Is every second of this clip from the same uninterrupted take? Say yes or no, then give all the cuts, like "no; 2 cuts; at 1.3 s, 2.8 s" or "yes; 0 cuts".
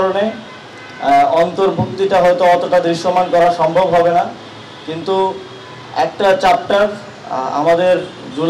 yes; 0 cuts